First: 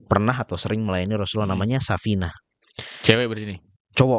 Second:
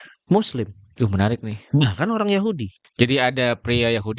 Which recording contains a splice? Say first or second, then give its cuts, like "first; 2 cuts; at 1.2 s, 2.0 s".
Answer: second; 1 cut; at 2.8 s